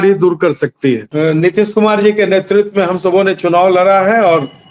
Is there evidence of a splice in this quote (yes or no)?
yes